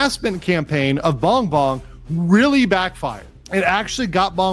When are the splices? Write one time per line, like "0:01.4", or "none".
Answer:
none

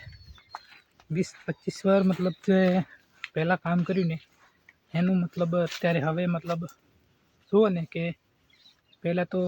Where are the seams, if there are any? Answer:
none

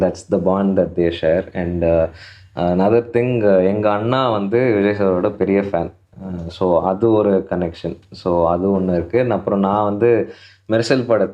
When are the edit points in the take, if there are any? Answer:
none

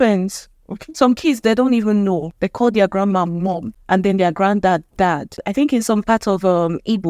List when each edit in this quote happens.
0:02.4
0:03.7
0:05.4

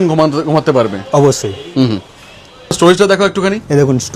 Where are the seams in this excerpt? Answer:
none

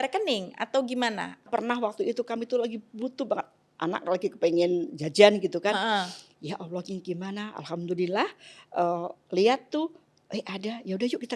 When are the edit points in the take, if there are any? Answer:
0:01.4

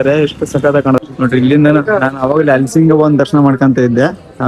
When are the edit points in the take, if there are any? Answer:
0:01.0

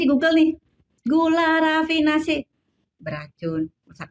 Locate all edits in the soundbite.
none

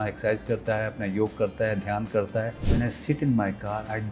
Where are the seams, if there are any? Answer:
0:02.7

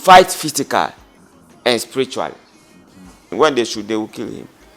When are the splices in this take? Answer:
0:03.3

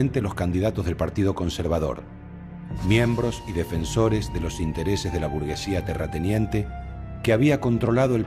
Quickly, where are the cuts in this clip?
0:01.5

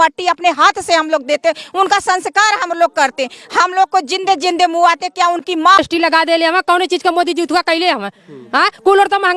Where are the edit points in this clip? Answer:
0:05.8

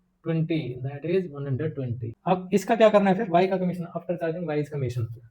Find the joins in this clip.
0:02.1

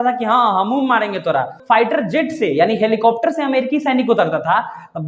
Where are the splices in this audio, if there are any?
0:01.6

